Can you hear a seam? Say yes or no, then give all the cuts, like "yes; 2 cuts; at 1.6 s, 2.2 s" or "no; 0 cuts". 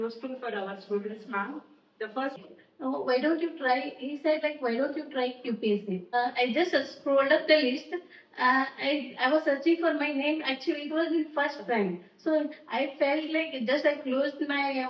yes; 2 cuts; at 2.4 s, 6.2 s